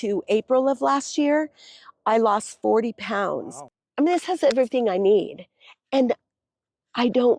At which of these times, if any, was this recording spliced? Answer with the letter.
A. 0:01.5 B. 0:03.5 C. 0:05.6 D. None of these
B